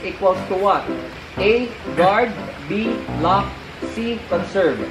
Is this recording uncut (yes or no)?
yes